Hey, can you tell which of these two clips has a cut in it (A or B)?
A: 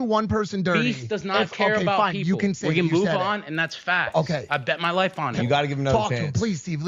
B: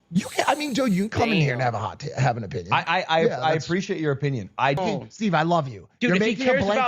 B